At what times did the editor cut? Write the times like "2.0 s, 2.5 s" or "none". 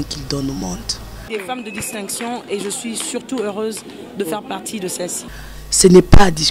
1.2 s, 5.2 s